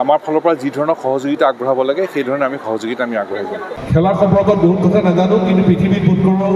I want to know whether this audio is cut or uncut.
cut